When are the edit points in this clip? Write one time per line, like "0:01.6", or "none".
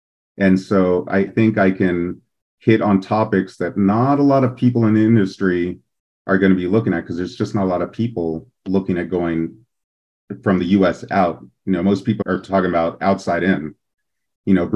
0:01.3
0:12.2